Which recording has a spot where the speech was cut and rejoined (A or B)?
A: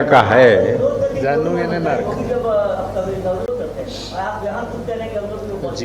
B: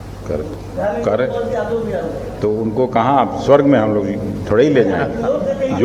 A